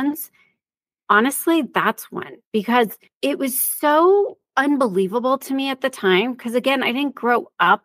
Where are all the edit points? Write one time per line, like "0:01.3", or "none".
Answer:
0:03.0
0:04.4